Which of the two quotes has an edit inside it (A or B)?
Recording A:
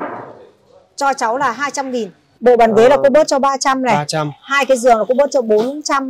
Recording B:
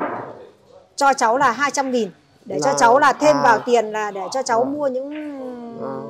A